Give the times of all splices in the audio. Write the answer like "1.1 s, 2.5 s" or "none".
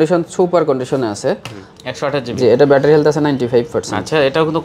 1.7 s

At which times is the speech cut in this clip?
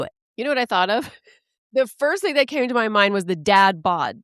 1.5 s

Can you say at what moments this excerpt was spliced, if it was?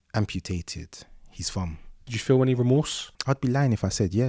2.1 s, 3.0 s

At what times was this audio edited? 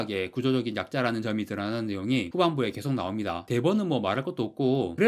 none

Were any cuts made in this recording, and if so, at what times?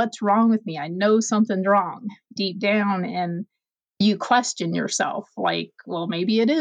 2.4 s, 4.0 s

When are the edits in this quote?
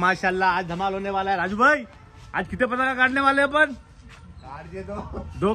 none

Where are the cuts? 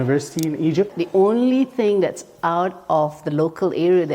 0.9 s

